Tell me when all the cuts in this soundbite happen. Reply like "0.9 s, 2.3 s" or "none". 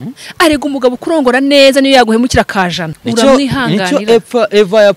2.9 s